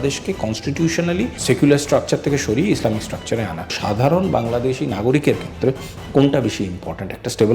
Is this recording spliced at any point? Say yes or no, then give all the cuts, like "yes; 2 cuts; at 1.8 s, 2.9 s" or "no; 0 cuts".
yes; 2 cuts; at 1.4 s, 3.8 s